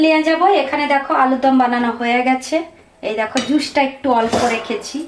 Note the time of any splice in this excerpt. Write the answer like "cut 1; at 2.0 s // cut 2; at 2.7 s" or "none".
none